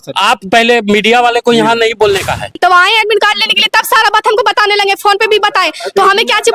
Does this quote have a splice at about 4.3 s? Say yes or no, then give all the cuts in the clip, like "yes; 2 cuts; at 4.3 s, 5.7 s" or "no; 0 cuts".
no; 1 cut; at 2.5 s